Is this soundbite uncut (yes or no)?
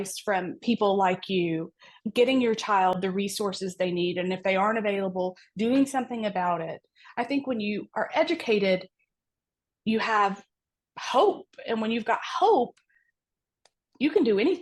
yes